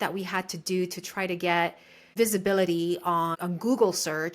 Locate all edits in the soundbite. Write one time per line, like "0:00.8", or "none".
0:02.1
0:03.3